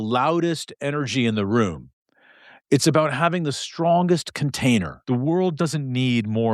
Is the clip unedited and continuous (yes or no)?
no